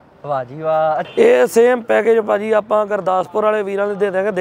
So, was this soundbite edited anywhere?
yes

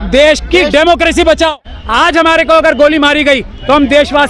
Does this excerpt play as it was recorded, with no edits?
no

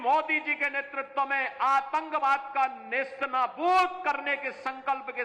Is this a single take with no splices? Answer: yes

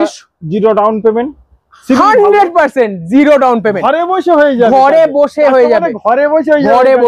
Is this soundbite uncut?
yes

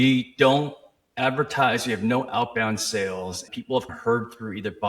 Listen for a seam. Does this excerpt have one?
yes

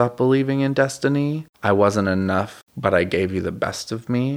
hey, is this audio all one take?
no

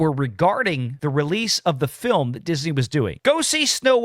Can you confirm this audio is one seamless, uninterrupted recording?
no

